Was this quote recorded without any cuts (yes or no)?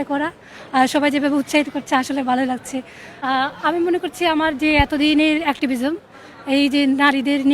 no